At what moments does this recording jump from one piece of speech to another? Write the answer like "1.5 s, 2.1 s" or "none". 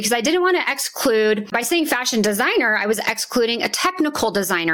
1.5 s